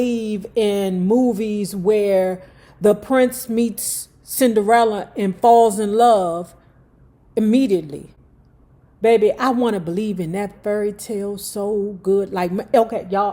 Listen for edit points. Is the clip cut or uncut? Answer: uncut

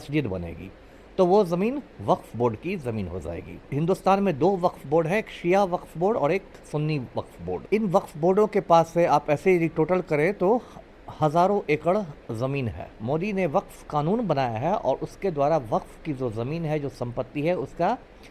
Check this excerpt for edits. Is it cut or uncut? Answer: cut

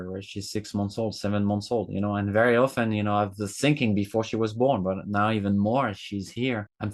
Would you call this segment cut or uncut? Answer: uncut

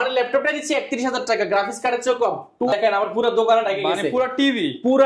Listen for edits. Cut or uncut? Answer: cut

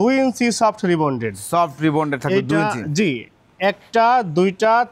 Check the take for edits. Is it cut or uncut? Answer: uncut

